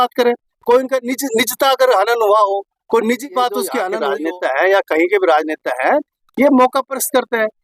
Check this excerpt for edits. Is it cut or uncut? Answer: cut